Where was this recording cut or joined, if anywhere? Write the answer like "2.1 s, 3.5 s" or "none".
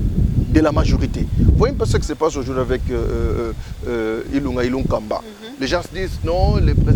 none